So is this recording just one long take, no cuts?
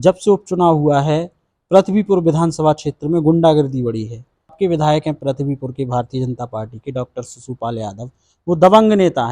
no; 1 cut; at 4.5 s

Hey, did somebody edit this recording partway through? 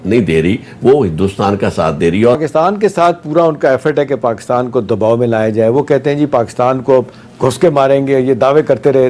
yes; 1 cut; at 2.4 s

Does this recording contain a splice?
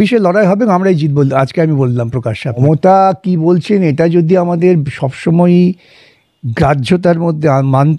yes; 1 cut; at 2.6 s

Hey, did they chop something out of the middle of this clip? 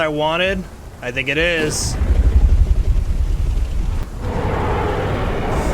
yes; 1 cut; at 4.0 s

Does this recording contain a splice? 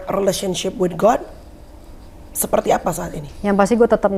no; 0 cuts

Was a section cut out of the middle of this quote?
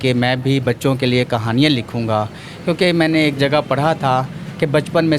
no; 0 cuts

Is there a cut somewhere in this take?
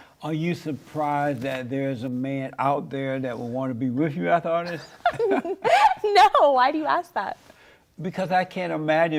no; 0 cuts

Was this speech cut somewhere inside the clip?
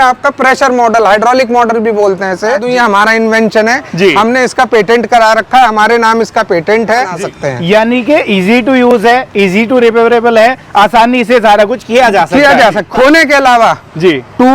yes; 3 cuts; at 2.6 s, 7.1 s, 12.8 s

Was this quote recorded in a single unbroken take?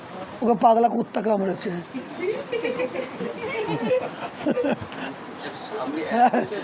yes; 0 cuts

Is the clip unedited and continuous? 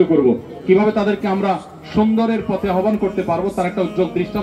yes; 0 cuts

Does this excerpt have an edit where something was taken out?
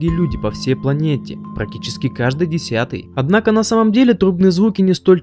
no; 0 cuts

